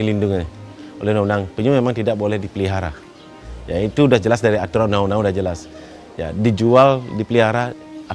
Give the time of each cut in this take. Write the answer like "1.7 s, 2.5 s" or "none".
none